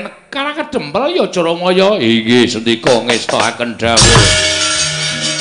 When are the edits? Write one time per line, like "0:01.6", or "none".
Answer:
none